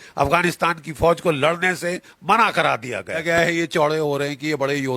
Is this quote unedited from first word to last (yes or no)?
no